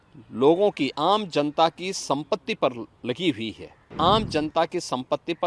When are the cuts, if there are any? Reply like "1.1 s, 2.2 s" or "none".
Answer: 3.9 s

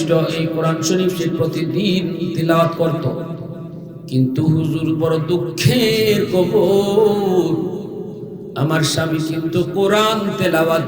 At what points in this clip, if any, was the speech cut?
none

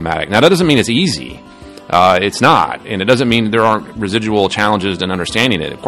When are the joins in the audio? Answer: none

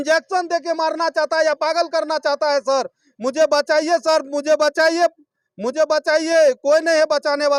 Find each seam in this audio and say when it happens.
none

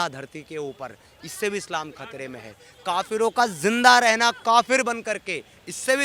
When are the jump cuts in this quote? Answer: none

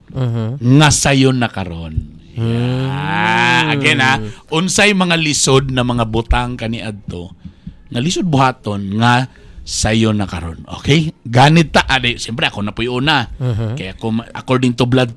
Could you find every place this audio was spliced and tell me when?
none

